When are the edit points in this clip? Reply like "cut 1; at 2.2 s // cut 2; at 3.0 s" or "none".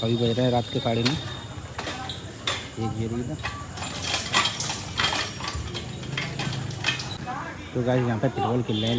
cut 1; at 7.1 s